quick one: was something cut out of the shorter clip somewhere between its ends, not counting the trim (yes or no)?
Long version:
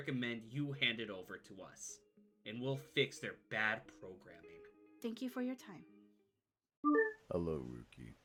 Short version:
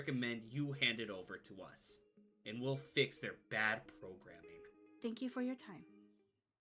no